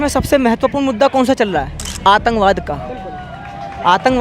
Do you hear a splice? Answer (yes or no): yes